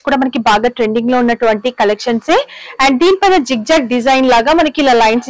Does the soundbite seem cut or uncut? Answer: uncut